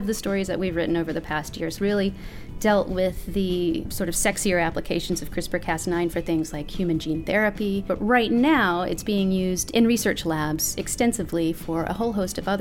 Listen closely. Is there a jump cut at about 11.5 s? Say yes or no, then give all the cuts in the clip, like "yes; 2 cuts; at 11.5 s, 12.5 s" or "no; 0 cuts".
no; 3 cuts; at 1.8 s, 3.9 s, 7.9 s